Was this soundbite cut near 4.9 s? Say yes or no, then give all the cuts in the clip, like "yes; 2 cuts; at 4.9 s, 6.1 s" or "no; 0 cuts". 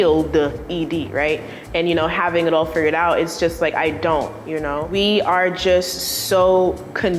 yes; 1 cut; at 4.9 s